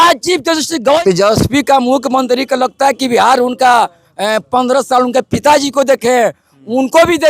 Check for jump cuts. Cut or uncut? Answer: cut